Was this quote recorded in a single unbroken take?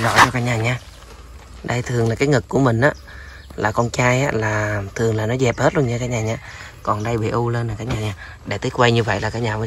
yes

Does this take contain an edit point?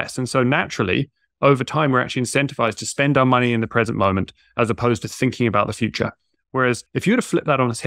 yes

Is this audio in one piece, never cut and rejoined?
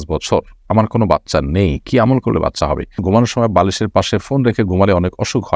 no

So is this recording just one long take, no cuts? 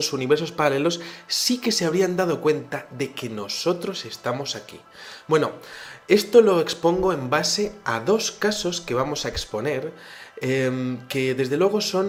yes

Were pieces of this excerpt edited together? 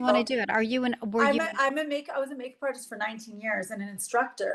no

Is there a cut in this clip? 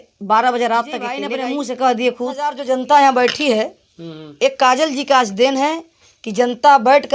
yes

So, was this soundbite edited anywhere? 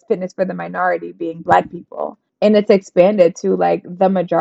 yes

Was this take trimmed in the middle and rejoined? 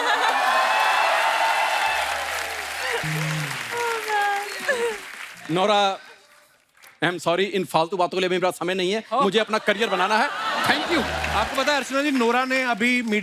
yes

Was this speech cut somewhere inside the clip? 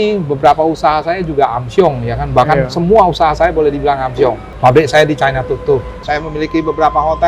yes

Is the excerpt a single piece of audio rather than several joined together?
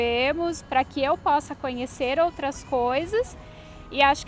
yes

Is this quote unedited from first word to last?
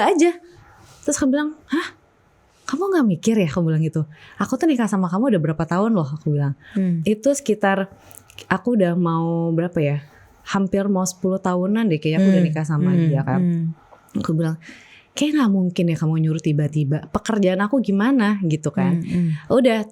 yes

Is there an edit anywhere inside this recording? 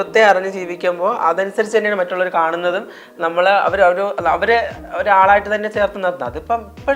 no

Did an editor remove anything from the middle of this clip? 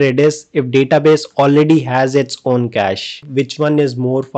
yes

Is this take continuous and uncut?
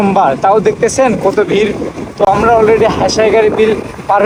yes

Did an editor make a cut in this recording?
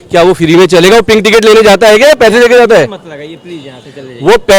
no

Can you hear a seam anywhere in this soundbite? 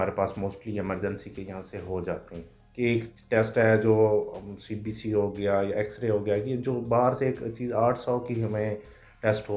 no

